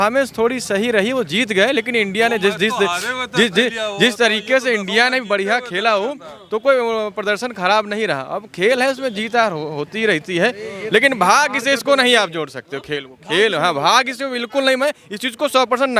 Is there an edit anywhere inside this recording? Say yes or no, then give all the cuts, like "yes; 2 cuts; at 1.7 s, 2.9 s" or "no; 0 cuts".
no; 0 cuts